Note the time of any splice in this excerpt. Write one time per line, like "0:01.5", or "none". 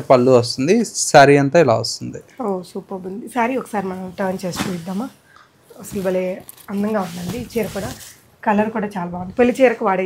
none